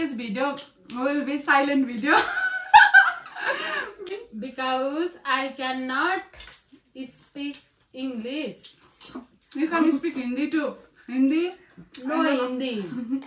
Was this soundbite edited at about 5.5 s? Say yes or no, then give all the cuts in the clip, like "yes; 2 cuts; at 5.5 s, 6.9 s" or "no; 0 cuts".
no; 1 cut; at 4.1 s